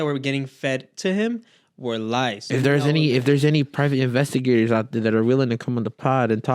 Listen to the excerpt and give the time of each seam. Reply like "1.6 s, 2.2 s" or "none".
2.4 s